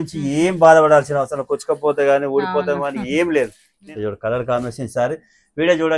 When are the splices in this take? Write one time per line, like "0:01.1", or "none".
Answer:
0:03.7